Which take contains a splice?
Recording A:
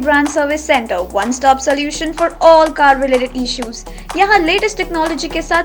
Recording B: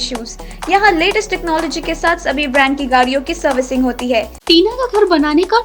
B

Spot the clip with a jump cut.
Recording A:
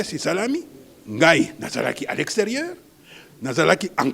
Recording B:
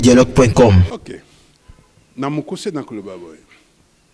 B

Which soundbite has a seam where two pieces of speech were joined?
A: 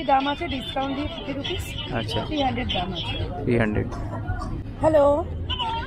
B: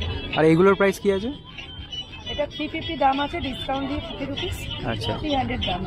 A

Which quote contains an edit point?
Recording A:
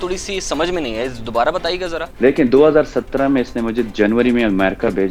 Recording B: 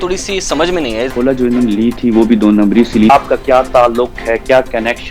B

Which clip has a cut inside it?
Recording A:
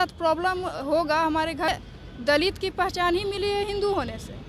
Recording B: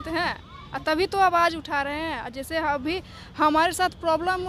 A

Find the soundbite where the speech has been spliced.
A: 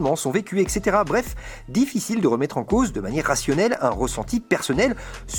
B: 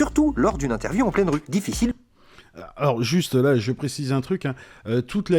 B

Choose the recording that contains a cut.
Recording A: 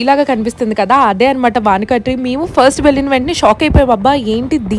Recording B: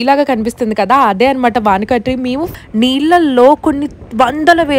B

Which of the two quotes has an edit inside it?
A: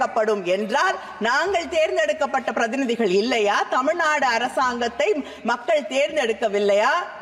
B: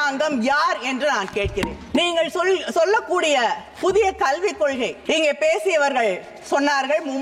B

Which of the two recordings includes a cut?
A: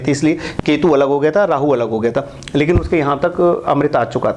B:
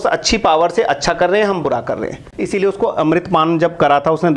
B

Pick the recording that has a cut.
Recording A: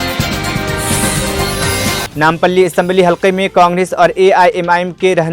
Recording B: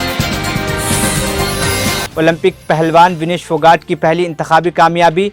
A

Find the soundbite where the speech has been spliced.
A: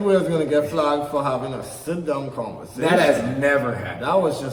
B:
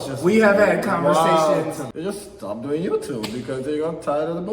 B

